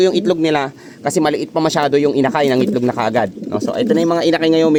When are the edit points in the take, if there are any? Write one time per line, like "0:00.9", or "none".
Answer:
none